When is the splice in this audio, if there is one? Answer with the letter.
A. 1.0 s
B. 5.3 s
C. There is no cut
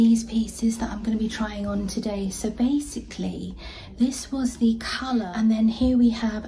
B